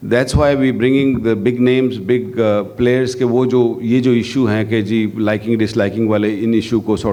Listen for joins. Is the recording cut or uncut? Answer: uncut